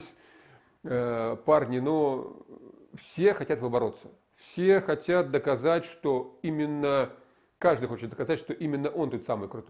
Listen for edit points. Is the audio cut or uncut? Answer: uncut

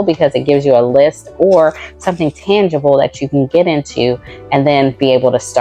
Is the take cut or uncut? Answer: uncut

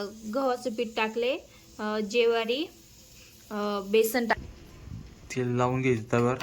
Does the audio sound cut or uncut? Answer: cut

